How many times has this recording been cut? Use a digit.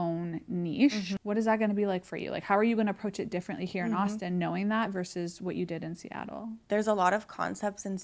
2